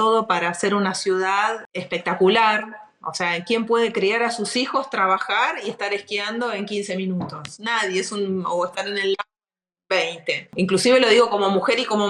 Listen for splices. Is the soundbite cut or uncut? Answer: cut